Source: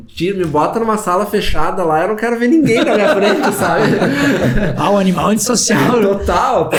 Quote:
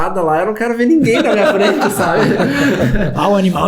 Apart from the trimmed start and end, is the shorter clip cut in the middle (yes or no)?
no